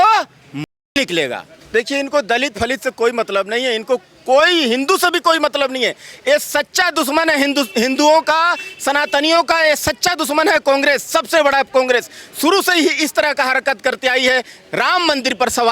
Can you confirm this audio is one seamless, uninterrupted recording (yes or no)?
no